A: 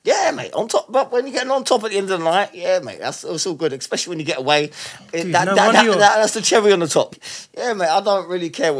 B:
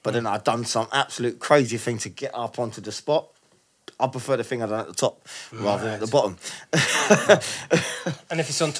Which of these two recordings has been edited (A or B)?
A